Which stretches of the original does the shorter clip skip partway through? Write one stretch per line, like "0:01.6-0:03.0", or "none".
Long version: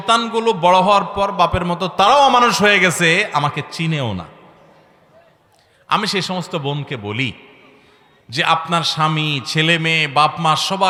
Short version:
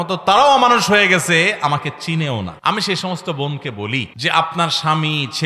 0:04.3-0:05.8
0:07.4-0:08.3